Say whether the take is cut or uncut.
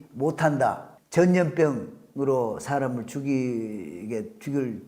cut